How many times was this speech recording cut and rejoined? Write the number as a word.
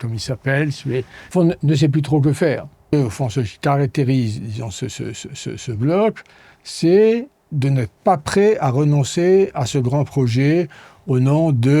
two